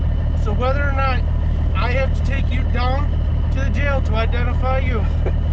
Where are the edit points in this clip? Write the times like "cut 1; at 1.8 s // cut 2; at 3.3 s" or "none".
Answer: none